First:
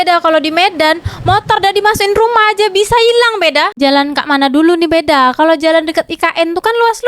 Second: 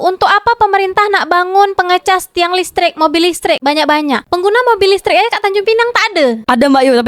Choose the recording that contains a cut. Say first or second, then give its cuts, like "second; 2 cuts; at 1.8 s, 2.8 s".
first; 1 cut; at 3.8 s